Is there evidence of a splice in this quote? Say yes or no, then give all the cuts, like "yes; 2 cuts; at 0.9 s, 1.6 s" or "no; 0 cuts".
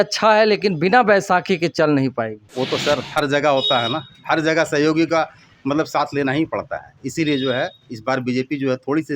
yes; 1 cut; at 2.4 s